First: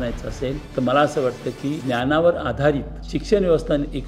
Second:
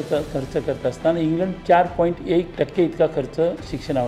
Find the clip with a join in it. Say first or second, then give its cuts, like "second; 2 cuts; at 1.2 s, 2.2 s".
second; 1 cut; at 2.5 s